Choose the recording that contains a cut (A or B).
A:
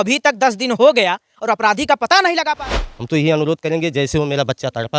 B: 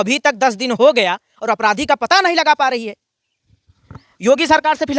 A